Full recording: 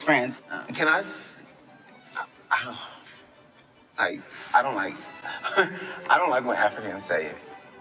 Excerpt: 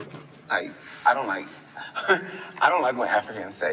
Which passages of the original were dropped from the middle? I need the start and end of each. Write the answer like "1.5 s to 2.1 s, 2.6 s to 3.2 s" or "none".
none